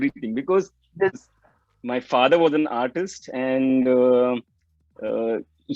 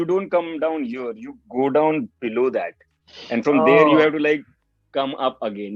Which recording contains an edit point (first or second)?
first